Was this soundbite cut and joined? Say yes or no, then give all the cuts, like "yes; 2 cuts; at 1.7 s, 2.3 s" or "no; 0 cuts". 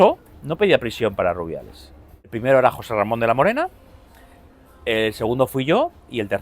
yes; 1 cut; at 2.3 s